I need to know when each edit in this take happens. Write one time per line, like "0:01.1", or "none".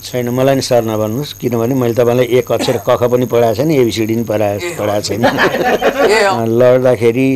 0:06.3

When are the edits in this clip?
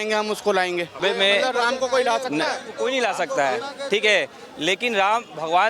0:01.0
0:02.7

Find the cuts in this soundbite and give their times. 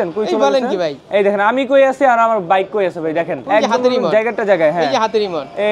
0:01.0
0:03.4

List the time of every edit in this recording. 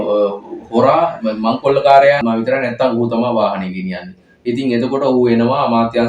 0:02.2

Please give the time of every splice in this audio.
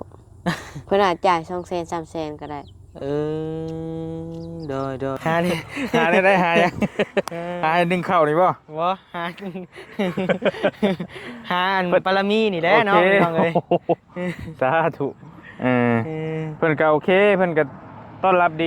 0:05.2

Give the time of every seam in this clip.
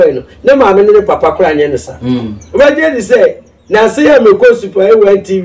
0:02.5

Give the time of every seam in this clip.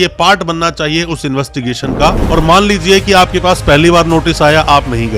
0:02.2

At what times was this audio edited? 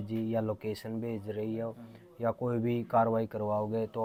none

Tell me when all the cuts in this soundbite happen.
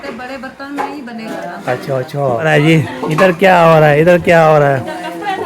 0:02.5

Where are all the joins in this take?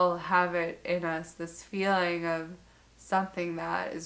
none

